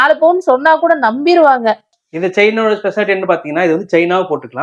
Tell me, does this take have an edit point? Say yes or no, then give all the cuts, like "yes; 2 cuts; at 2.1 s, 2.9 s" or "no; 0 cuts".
yes; 1 cut; at 1.9 s